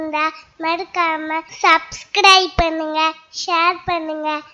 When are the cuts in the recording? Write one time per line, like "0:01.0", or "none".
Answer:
0:01.5